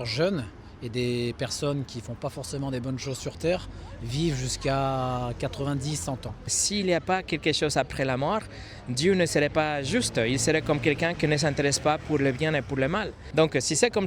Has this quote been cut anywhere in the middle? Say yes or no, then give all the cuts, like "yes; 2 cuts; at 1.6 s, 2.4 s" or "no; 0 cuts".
yes; 2 cuts; at 6.6 s, 13.2 s